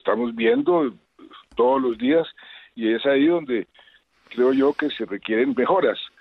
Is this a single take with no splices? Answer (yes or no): yes